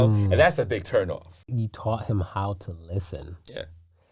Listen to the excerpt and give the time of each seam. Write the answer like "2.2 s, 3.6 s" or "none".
1.4 s